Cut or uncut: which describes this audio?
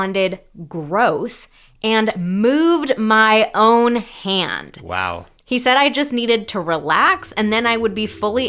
uncut